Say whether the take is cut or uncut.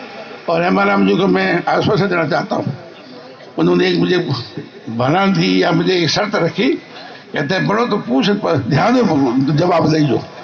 uncut